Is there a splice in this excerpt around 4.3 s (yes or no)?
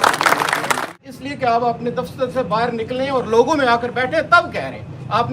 no